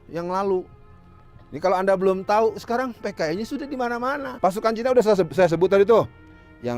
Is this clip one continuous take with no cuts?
no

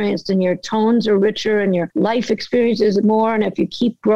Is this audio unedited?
no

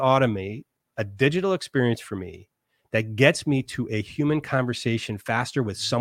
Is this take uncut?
yes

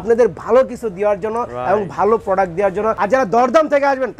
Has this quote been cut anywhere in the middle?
yes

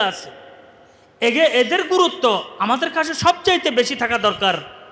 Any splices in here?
no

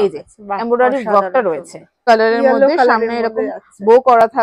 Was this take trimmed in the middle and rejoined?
yes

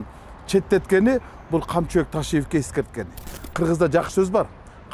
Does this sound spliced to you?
yes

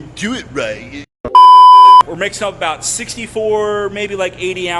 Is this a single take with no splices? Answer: no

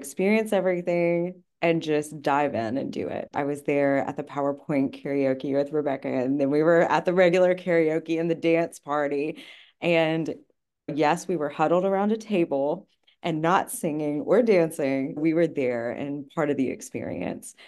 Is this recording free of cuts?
yes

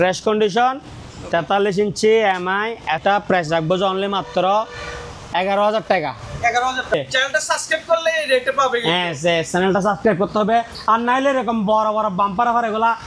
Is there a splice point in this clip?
yes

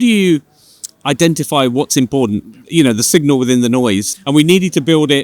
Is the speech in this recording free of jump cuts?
no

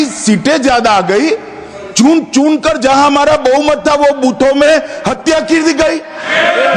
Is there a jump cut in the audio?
no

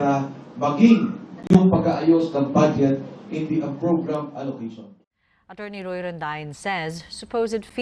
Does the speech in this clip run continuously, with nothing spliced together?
no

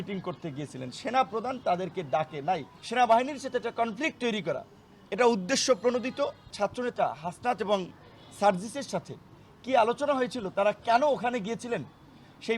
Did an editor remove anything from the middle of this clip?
yes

